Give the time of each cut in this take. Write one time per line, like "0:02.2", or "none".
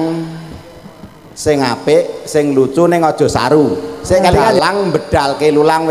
0:04.6

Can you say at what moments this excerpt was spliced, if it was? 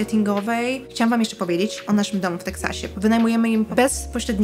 0:00.9
0:01.8
0:02.8
0:03.7

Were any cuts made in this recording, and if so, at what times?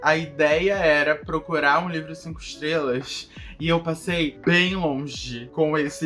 none

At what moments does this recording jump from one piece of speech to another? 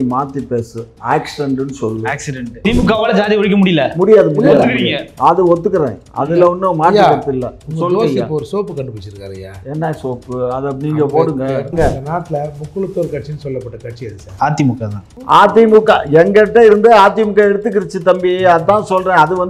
0:02.6
0:11.7

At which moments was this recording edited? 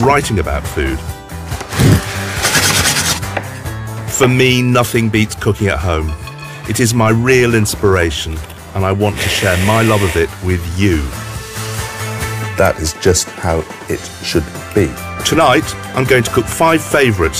0:10.9

